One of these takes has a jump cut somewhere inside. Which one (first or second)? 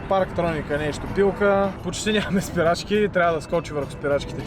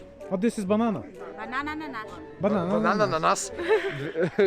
first